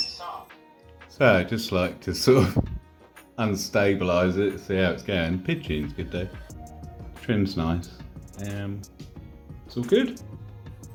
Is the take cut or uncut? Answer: uncut